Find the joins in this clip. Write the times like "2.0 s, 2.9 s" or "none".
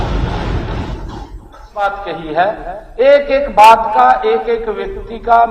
1.7 s

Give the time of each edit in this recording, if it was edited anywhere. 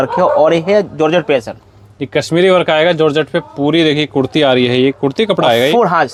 none

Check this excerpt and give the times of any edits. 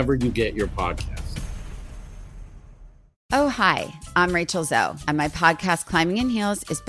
3.2 s

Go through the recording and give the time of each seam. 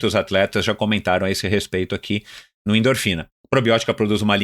3.3 s

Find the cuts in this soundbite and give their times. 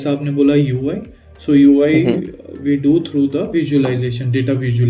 none

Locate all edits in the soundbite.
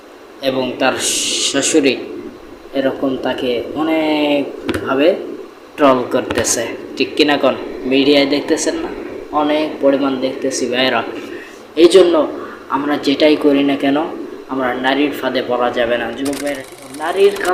16.6 s

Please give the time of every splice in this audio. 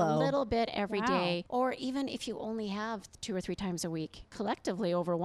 1.4 s, 4.3 s

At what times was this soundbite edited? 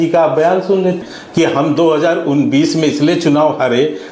1.1 s

